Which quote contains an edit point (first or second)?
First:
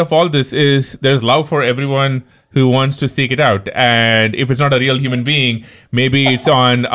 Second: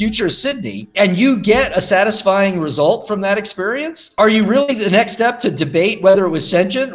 second